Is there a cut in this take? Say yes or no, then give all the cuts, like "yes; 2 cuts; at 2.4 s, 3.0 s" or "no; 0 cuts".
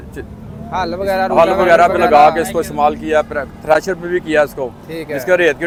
no; 0 cuts